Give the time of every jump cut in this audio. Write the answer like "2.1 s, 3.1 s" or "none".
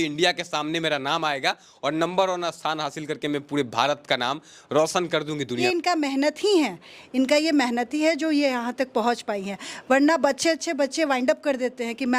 5.6 s